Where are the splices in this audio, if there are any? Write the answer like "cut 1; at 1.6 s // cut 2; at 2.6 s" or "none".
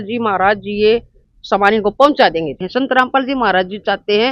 cut 1; at 2.6 s

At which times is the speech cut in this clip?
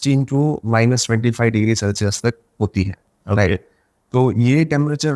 none

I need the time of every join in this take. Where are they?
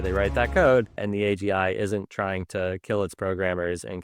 cut 1; at 1.0 s

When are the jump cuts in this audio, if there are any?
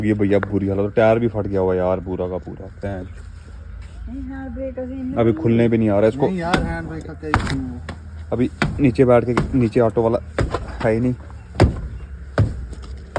none

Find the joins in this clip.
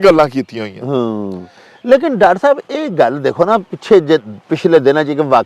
none

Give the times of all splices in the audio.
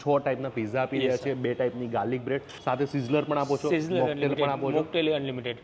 cut 1; at 2.5 s

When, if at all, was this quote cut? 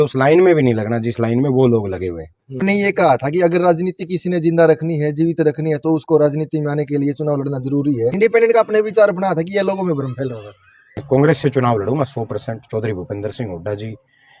cut 1; at 2.6 s // cut 2; at 8.1 s

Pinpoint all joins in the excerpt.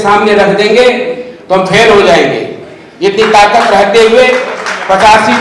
none

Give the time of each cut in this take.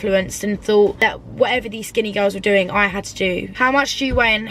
cut 1; at 3.5 s

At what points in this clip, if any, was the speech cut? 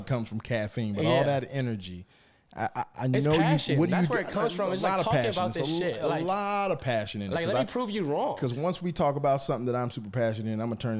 none

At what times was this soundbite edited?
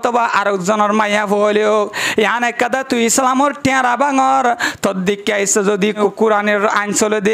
cut 1; at 6.0 s

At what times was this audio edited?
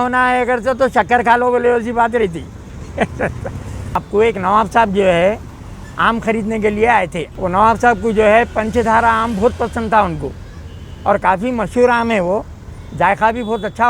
cut 1; at 4.0 s // cut 2; at 7.2 s

